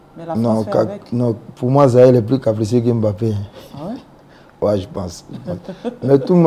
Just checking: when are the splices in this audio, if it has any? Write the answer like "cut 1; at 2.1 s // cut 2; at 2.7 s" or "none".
none

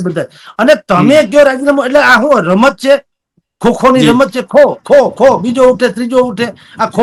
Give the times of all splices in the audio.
none

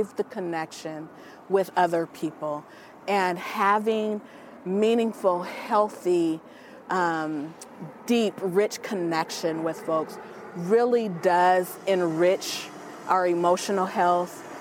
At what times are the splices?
none

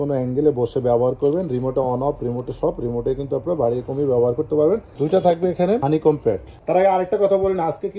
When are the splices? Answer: cut 1; at 4.9 s // cut 2; at 6.5 s

